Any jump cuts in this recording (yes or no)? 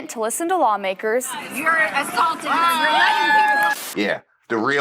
yes